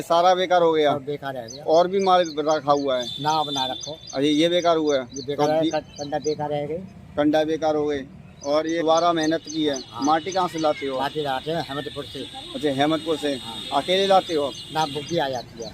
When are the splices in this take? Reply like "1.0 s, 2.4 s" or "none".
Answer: 8.8 s